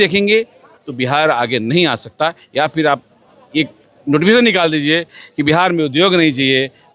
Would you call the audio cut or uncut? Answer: uncut